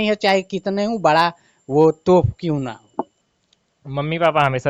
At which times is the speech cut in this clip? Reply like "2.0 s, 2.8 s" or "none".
3.1 s